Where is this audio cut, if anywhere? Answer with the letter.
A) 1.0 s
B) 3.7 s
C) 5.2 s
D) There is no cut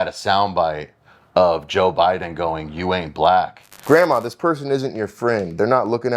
B